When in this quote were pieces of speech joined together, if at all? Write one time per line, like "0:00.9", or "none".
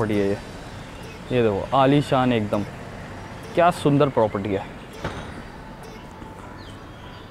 none